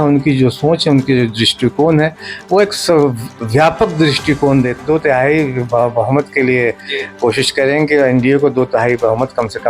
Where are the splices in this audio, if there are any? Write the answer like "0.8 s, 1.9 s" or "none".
4.8 s